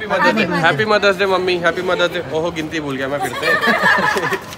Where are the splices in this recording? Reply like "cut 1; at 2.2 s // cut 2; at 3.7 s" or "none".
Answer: none